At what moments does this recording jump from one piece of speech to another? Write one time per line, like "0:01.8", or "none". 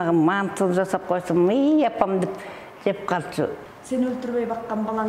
0:03.6

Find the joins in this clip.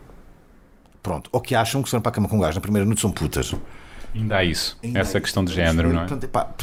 none

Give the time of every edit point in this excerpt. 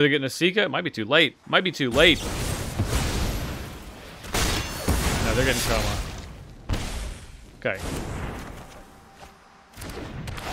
0:01.4

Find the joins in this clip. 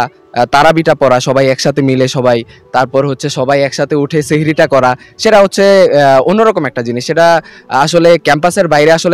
none

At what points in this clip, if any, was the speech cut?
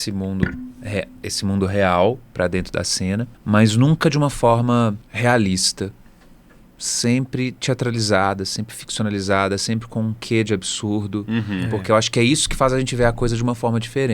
0:03.3
0:05.1

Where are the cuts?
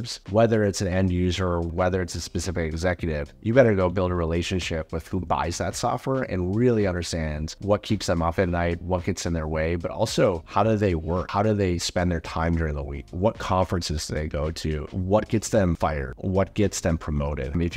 0:01.7

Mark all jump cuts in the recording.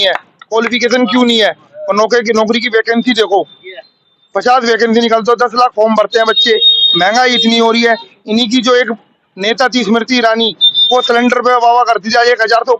none

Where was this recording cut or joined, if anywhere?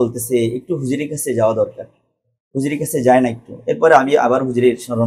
none

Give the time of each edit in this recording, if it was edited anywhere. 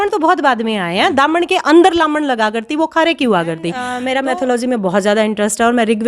0:03.9

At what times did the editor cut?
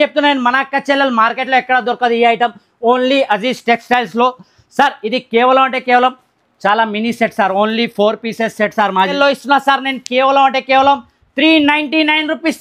0:09.1

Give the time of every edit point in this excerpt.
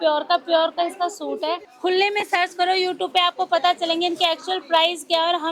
0:01.7

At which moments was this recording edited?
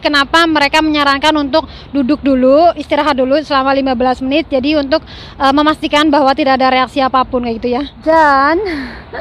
0:07.9

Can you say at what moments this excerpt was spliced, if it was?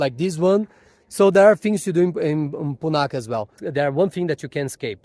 0:03.6

